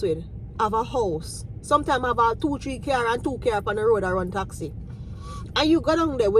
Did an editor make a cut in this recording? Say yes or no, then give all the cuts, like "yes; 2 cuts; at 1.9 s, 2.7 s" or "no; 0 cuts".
no; 0 cuts